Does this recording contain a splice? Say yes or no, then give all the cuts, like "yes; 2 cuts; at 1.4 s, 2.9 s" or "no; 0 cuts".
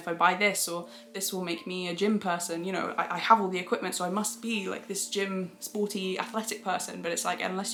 no; 0 cuts